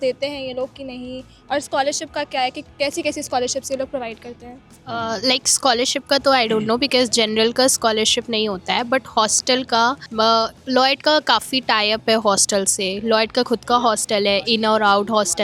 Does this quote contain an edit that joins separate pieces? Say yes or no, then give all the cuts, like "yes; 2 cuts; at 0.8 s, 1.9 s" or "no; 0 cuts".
no; 0 cuts